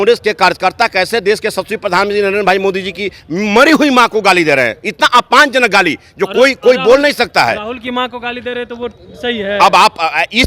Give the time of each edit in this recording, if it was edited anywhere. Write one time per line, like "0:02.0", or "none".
none